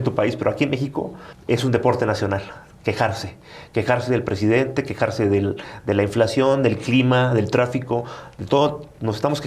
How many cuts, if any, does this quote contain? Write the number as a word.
zero